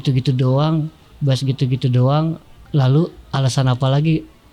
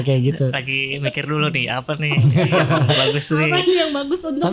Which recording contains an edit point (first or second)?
first